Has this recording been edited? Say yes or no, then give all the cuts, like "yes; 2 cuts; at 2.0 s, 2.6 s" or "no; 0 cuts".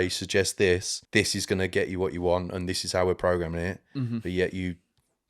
yes; 1 cut; at 0.9 s